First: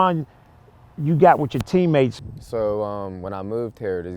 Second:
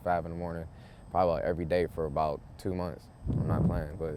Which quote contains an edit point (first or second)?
first